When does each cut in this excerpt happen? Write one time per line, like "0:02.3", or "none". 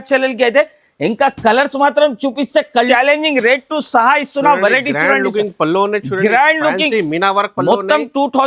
0:02.7